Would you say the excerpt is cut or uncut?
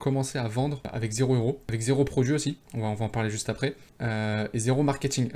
cut